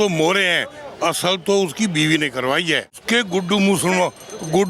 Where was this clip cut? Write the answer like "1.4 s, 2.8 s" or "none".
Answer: 3.0 s